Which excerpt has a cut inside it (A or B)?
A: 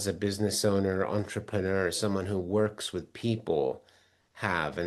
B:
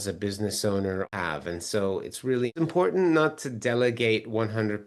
B